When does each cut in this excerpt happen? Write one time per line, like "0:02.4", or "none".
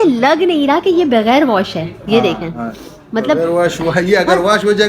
none